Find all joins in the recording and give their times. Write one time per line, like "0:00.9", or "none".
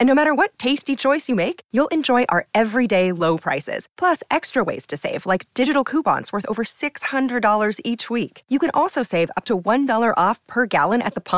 none